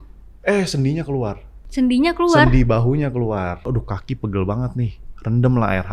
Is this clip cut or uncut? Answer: cut